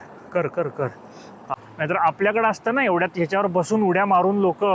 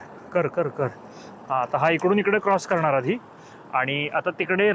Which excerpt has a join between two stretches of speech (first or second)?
first